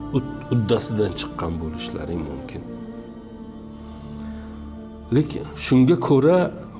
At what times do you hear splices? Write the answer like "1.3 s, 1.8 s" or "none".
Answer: 2.9 s, 4.6 s